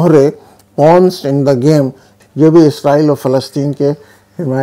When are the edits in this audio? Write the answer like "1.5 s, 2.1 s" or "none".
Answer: 2.1 s